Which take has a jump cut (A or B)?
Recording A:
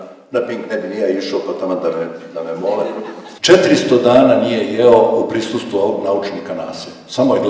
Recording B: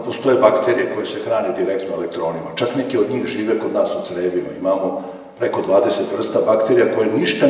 A